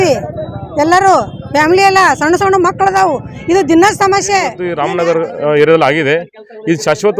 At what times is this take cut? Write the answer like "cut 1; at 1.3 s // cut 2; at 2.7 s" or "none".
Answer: cut 1; at 4.7 s